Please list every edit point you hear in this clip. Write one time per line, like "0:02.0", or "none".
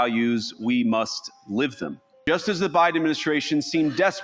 0:02.1